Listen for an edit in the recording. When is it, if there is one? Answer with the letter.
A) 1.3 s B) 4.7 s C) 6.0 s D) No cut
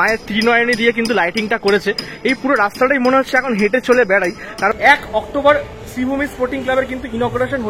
B